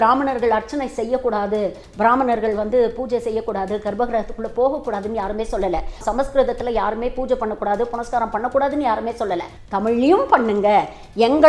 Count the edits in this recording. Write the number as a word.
two